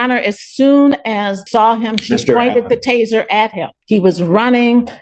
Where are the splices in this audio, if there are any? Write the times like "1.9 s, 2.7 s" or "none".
1.4 s, 3.7 s